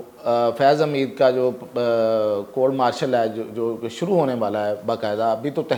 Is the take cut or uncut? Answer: uncut